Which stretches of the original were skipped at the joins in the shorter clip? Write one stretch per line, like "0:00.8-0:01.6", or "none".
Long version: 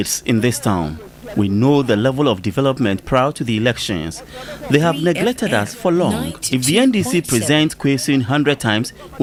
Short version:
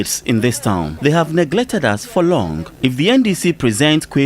0:00.9-0:04.6

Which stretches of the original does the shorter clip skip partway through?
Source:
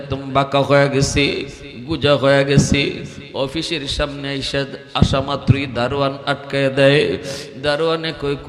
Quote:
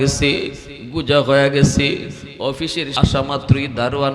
0:03.9-0:04.9

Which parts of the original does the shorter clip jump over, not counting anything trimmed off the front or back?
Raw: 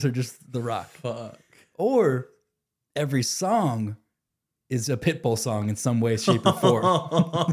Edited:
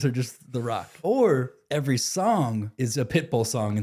0:00.9-0:01.7
0:02.3-0:02.8
0:04.0-0:04.6

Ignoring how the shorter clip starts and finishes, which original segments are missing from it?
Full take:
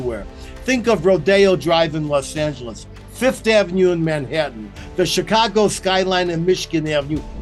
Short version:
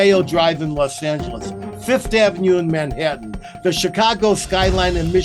none

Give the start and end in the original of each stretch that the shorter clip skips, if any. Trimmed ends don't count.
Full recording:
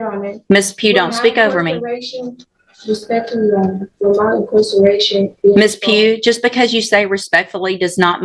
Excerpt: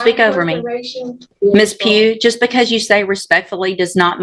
0:02.5-0:05.3

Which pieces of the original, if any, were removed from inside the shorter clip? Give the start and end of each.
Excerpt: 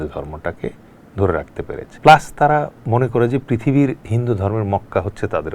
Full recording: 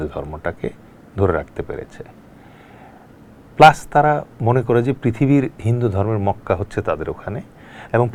0:01.9-0:03.4

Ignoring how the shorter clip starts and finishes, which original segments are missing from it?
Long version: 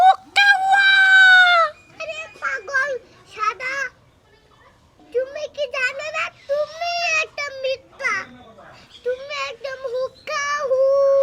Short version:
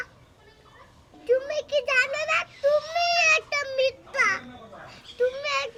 none

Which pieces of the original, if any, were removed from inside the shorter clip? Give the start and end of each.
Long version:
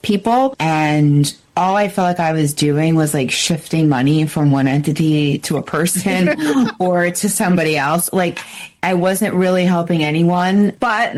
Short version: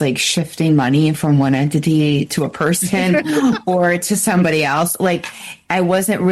none

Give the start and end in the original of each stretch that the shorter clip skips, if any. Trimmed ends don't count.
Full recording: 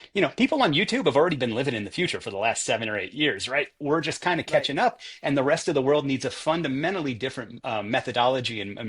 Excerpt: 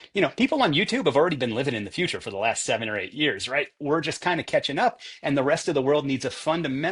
none

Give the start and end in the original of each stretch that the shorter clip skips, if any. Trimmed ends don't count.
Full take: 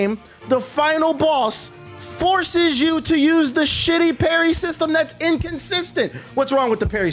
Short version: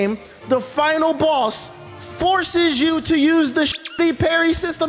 none

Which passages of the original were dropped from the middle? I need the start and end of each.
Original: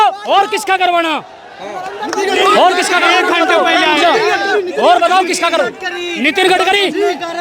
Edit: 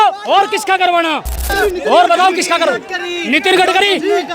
0:01.5-0:04.4

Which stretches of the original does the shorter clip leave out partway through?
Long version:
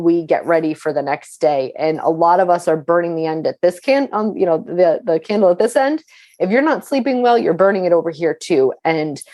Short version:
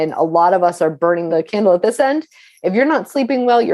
0:03.1-0:05.0

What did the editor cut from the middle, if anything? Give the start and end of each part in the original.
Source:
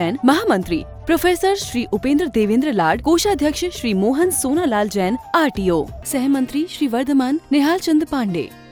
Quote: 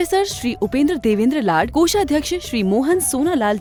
none

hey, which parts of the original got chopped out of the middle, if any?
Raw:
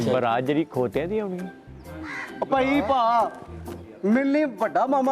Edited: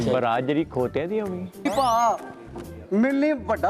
0:01.7-0:02.8

